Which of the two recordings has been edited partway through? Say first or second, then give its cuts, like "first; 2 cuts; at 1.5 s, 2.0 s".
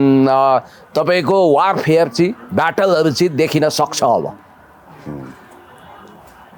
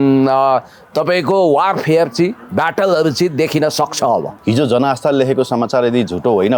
second; 1 cut; at 4.3 s